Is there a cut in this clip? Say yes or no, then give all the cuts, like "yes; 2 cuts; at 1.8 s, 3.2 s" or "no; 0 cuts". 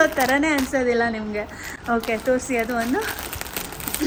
no; 0 cuts